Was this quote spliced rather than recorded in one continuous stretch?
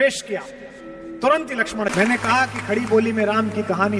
yes; 1 cut; at 1.9 s

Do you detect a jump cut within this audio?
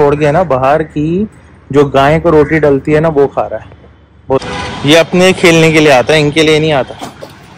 yes; 1 cut; at 4.4 s

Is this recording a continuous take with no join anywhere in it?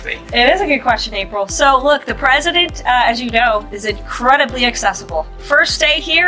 yes; 0 cuts

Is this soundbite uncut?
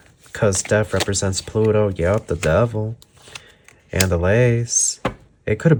yes; 0 cuts

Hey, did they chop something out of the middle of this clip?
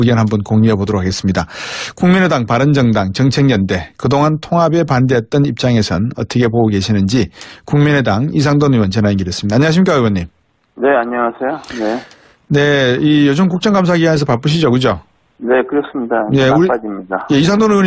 no; 0 cuts

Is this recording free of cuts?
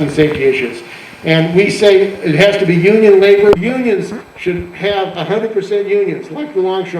no; 1 cut; at 3.6 s

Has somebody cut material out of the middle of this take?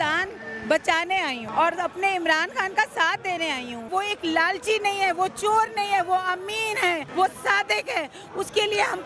yes; 3 cuts; at 1.4 s, 3.9 s, 7.1 s

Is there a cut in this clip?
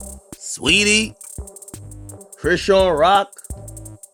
no; 0 cuts

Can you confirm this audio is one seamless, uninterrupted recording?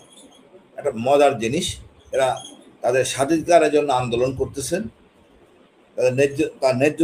yes; 0 cuts

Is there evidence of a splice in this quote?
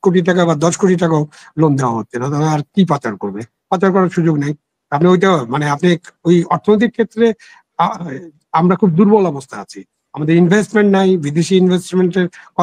no; 0 cuts

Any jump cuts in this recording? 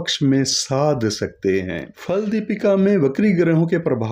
yes; 1 cut; at 1.9 s

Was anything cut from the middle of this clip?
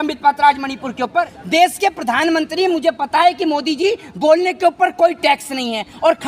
yes; 1 cut; at 1.4 s

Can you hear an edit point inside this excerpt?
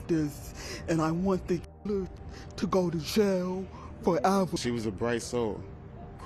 yes; 1 cut; at 4.6 s

